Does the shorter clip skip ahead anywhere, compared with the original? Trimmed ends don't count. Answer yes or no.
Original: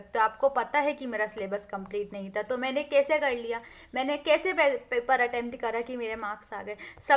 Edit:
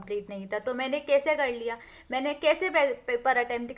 no